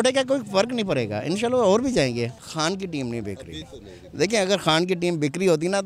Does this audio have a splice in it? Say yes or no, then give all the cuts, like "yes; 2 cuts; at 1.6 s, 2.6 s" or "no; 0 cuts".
yes; 1 cut; at 2.4 s